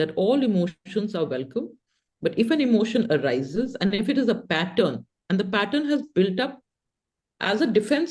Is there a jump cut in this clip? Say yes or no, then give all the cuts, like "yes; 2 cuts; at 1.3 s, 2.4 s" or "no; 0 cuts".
no; 0 cuts